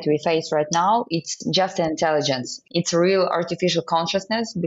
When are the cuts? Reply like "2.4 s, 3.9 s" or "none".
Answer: 2.6 s